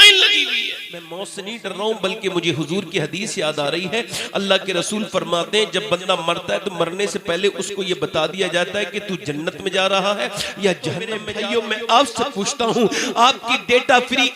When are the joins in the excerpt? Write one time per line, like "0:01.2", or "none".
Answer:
0:01.1
0:11.3